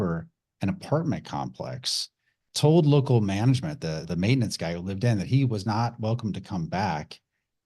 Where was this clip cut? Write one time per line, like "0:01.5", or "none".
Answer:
none